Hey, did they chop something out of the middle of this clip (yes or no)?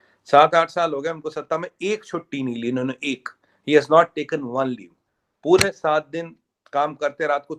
no